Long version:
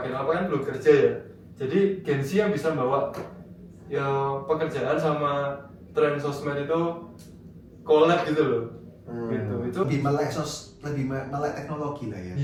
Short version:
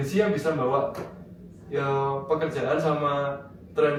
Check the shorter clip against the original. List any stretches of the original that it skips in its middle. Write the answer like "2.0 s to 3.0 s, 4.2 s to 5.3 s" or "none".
none